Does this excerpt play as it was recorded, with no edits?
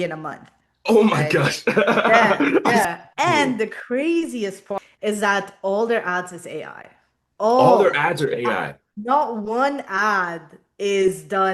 no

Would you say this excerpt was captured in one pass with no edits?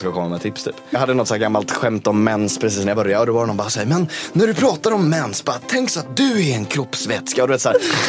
no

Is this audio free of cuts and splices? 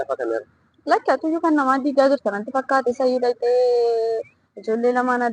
yes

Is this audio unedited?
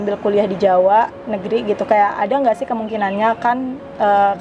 yes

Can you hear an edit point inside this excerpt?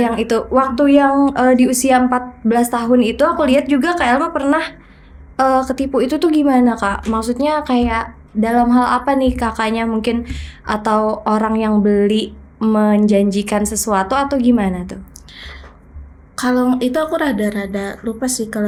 no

